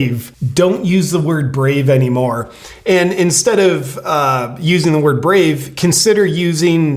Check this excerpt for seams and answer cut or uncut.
uncut